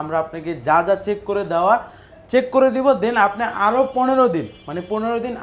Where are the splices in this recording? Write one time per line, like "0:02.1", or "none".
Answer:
none